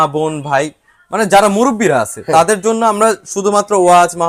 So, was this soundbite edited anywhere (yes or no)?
no